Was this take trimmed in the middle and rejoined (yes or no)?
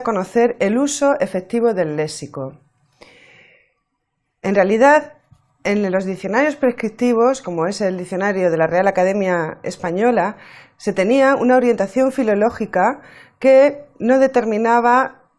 yes